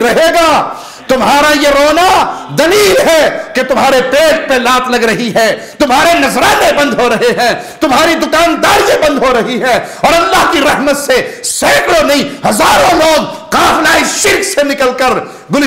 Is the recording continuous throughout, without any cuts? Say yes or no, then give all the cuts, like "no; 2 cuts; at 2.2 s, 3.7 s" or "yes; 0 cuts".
yes; 0 cuts